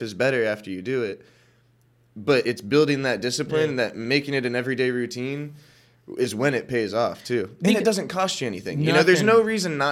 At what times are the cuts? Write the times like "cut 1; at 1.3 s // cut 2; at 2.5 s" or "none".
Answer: none